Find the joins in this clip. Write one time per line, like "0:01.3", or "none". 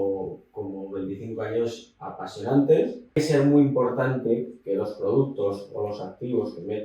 0:03.2